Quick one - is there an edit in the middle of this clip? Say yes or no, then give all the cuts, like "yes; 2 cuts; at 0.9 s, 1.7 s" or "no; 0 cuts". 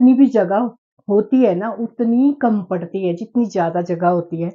no; 0 cuts